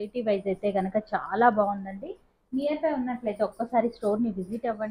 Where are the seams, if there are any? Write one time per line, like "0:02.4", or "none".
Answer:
none

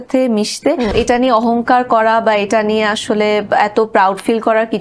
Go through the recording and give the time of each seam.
0:00.9

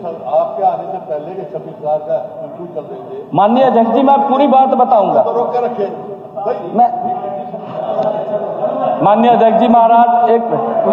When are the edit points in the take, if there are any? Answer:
0:07.6

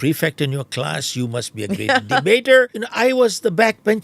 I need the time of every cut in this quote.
0:02.8

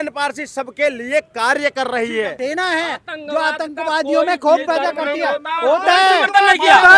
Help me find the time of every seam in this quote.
0:02.4

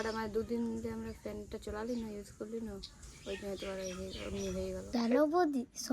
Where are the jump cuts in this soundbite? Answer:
0:04.8

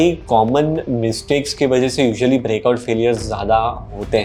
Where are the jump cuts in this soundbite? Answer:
none

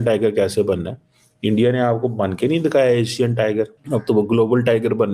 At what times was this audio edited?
0:03.8

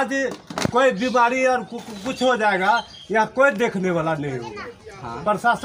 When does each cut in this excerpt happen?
none

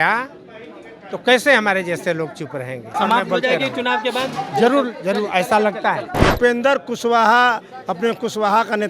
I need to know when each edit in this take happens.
0:02.9
0:06.1

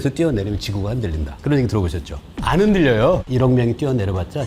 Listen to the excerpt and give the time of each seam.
0:02.3
0:03.2

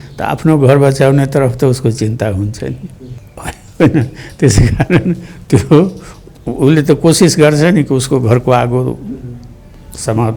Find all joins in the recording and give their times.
none

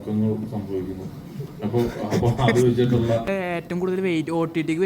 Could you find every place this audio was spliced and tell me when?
0:03.3

